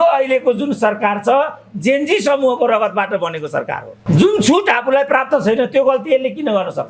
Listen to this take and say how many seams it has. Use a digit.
1